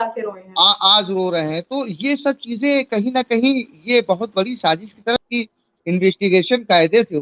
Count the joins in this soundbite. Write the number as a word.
one